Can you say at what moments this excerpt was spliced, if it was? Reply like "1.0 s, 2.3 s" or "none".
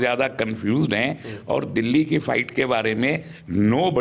none